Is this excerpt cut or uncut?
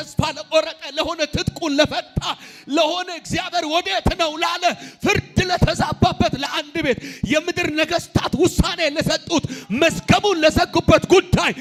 uncut